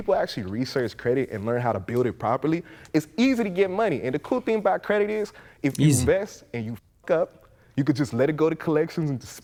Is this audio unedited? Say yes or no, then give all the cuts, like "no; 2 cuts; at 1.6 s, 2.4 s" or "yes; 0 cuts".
yes; 0 cuts